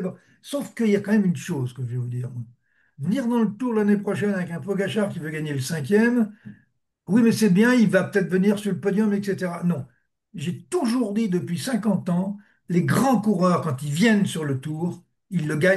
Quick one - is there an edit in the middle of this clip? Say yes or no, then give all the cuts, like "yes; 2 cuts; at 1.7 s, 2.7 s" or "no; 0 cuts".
no; 0 cuts